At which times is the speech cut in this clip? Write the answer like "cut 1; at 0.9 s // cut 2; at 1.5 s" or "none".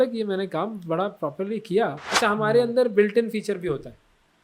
cut 1; at 2.1 s